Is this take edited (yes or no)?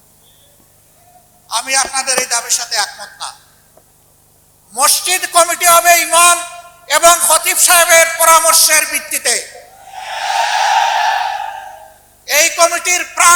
no